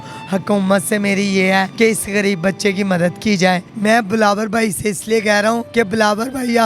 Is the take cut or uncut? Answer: cut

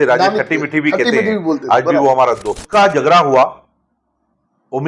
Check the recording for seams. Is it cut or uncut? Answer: cut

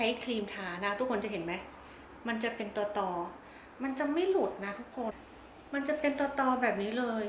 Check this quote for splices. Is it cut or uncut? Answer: cut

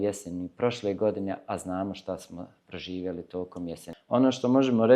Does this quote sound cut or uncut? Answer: cut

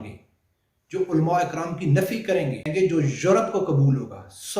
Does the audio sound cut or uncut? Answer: cut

